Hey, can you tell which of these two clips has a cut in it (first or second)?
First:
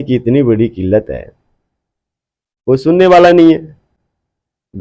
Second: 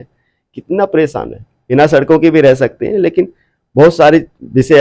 second